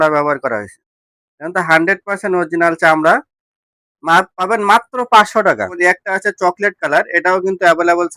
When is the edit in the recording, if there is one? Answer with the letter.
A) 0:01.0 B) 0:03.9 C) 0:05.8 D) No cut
C